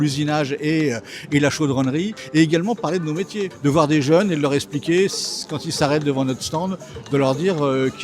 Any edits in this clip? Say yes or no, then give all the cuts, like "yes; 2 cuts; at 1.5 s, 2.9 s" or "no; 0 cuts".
yes; 2 cuts; at 2.2 s, 3.5 s